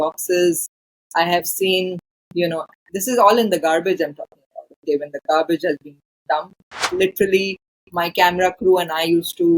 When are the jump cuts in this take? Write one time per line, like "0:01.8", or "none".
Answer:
0:06.9